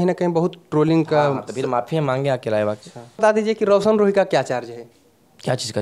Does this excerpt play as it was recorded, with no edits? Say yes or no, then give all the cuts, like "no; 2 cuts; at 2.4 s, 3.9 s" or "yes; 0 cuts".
no; 1 cut; at 3.2 s